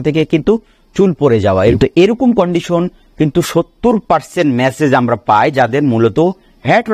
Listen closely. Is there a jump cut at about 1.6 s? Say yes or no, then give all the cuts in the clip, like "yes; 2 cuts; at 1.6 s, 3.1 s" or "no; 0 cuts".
yes; 1 cut; at 1.6 s